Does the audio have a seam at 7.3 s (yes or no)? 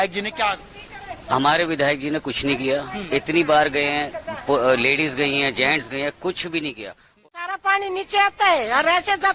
yes